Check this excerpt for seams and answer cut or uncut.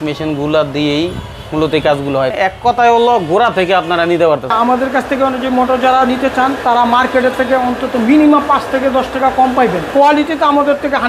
cut